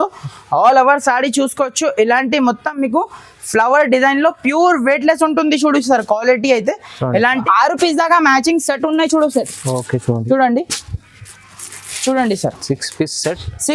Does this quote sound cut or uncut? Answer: cut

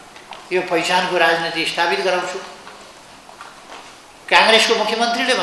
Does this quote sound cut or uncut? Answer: uncut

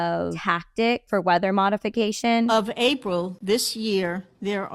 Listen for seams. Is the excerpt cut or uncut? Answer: cut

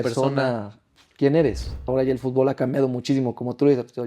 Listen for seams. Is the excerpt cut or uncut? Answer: cut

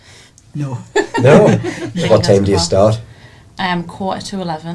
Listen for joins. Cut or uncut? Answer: cut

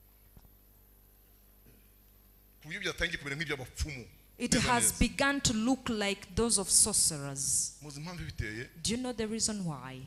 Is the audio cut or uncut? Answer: uncut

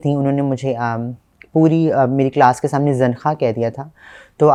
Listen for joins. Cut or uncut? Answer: uncut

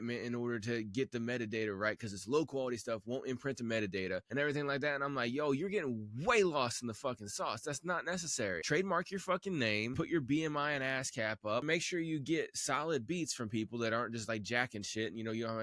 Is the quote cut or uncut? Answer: cut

